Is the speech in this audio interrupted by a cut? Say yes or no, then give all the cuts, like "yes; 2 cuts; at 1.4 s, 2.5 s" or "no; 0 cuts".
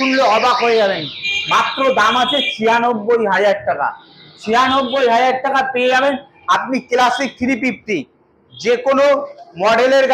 no; 0 cuts